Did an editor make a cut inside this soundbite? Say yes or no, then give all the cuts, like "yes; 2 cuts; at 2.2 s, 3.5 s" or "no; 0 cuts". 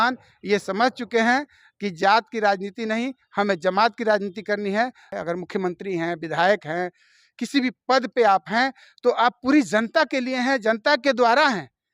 yes; 1 cut; at 5.0 s